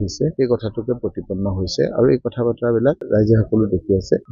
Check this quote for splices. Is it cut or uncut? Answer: uncut